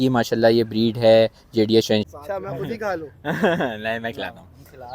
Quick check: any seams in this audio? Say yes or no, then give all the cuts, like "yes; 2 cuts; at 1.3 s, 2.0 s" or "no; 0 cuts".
yes; 1 cut; at 2.1 s